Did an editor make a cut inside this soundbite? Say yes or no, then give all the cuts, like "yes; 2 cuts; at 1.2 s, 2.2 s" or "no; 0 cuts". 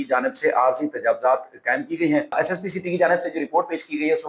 yes; 1 cut; at 2.3 s